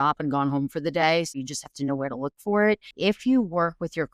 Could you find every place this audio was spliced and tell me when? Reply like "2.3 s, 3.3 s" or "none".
1.4 s, 2.9 s

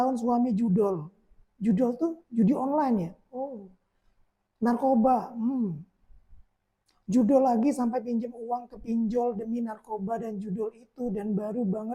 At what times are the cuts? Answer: none

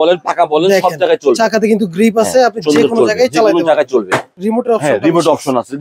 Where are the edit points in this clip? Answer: 4.4 s

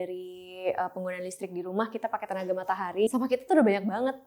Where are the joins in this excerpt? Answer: 3.1 s

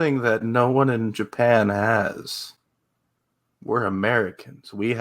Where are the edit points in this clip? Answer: none

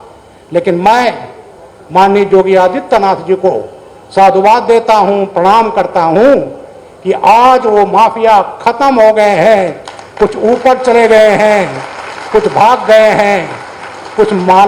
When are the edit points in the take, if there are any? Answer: none

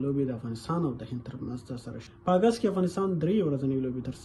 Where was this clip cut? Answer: 2.0 s

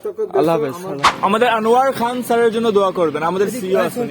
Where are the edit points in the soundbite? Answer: 1.1 s

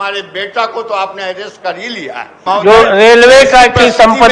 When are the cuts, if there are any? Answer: 2.4 s

